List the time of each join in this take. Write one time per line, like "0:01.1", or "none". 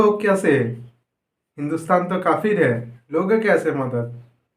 0:03.0